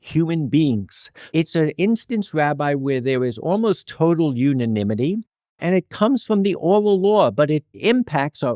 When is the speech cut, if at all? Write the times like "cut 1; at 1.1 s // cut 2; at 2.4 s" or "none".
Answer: cut 1; at 1.2 s